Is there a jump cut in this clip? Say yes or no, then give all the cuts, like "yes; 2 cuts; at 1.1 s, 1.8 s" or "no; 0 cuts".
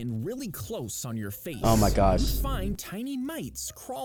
no; 0 cuts